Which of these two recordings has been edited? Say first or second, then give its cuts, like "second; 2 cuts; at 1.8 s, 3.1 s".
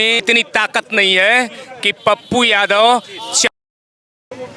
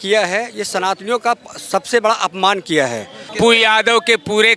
second; 1 cut; at 3.3 s